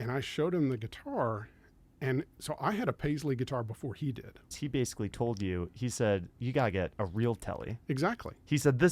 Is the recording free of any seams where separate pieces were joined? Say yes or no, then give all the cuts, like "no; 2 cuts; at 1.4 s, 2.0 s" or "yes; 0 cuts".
no; 1 cut; at 4.5 s